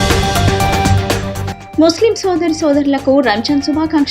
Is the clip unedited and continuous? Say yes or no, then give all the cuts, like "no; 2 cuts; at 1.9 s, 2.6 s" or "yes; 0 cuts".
no; 1 cut; at 1.1 s